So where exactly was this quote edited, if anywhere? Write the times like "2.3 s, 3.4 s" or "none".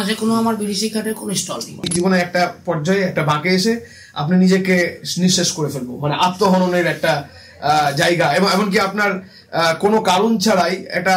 1.9 s